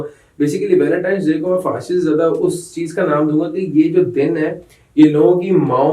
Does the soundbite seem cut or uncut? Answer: uncut